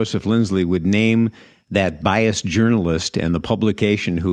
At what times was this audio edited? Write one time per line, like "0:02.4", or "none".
none